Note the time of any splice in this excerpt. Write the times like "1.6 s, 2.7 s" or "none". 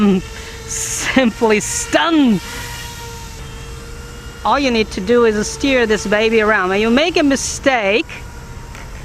3.3 s